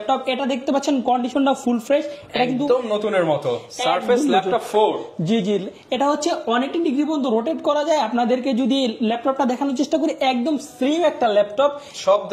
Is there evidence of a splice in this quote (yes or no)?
no